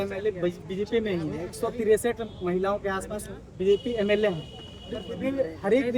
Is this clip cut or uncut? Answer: uncut